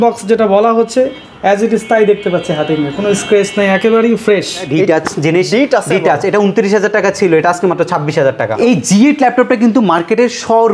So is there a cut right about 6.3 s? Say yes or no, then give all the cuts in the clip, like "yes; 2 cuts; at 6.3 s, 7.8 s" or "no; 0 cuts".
no; 2 cuts; at 4.7 s, 8.5 s